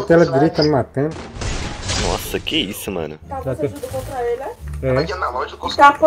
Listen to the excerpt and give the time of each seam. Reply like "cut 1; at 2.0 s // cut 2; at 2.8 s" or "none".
cut 1; at 1.1 s